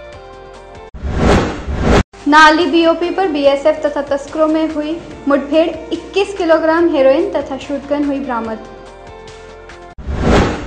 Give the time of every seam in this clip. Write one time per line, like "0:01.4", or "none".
0:00.9
0:02.1